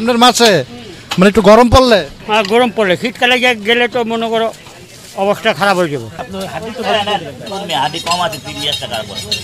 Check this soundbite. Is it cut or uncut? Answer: cut